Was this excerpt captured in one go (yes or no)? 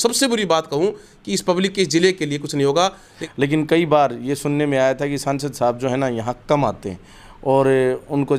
no